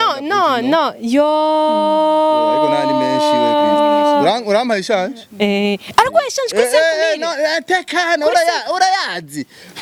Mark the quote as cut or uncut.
uncut